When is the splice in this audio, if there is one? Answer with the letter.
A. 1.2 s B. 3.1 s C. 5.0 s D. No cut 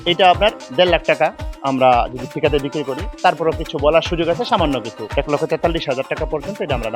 C